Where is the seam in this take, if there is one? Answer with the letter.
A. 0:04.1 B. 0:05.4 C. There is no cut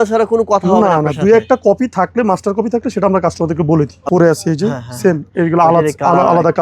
A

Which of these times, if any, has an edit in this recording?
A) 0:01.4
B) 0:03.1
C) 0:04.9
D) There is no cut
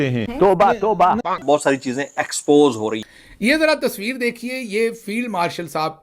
B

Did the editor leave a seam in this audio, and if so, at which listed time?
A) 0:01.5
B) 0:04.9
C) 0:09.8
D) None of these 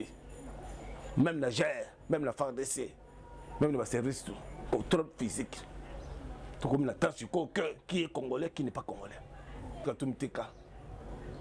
C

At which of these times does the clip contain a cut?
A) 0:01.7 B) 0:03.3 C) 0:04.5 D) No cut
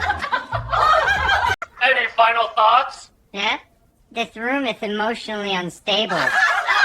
A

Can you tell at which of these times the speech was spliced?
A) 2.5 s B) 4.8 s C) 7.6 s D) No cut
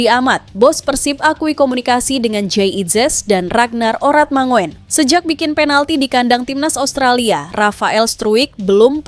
B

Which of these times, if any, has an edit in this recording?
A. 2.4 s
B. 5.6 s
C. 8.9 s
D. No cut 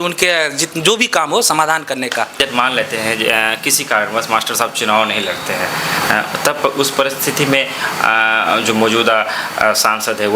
A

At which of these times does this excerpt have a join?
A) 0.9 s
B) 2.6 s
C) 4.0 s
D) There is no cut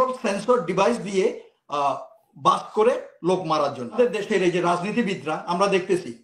C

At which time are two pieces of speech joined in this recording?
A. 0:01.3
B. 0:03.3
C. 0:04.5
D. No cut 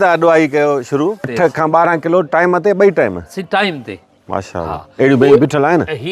A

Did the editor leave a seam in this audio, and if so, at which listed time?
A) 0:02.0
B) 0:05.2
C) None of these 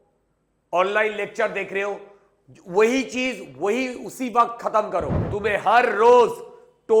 B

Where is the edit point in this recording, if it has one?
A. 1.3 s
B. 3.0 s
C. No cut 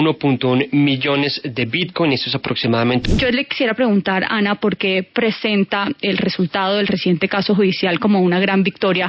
B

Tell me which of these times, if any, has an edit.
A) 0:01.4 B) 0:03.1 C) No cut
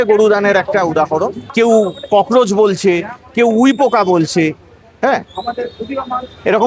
A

